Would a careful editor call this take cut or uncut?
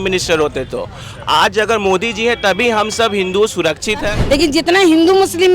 cut